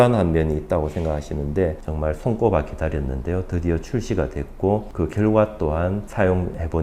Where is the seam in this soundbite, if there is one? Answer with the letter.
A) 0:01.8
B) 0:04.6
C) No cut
A